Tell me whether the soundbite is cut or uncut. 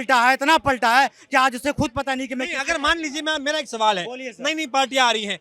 uncut